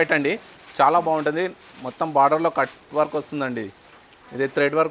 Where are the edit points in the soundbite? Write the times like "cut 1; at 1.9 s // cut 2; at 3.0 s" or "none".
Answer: none